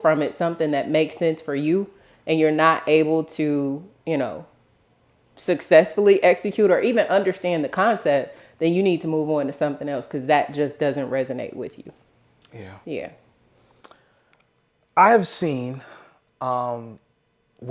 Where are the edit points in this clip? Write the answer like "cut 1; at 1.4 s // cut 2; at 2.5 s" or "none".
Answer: none